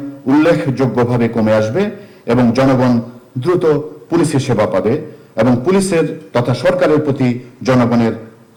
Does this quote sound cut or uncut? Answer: uncut